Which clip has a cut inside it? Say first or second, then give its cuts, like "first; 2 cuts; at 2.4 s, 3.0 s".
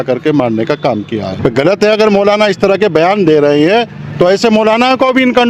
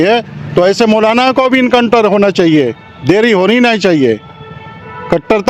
first; 1 cut; at 1.3 s